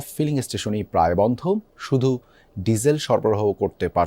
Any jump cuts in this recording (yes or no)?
no